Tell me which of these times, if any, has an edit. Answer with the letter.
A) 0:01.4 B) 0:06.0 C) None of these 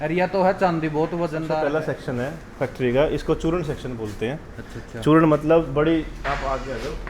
A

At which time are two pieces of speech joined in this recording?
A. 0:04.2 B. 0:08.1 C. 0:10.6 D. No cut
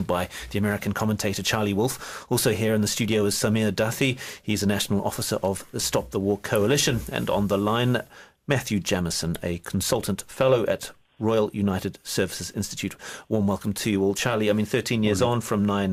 D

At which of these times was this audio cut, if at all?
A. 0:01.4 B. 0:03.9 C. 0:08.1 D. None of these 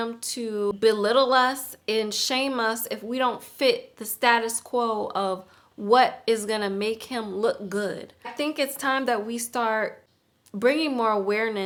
D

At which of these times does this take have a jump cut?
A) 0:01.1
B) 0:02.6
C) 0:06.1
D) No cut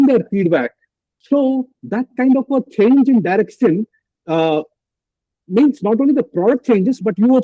A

